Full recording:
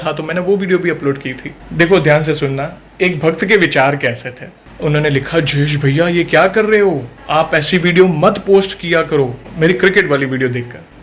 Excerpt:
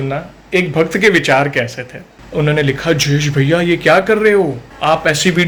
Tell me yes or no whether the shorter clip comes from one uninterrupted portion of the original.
yes